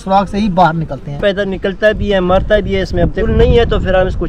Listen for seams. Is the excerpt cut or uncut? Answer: cut